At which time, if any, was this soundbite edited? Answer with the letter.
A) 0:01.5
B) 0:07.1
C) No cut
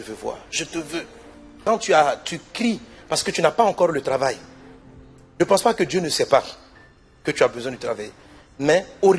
A